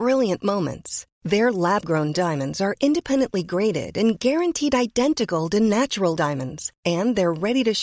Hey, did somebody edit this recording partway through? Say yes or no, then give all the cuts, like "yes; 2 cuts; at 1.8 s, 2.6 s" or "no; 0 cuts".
no; 0 cuts